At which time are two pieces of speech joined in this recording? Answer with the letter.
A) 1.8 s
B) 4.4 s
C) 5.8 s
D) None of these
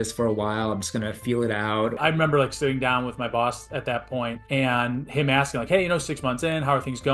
A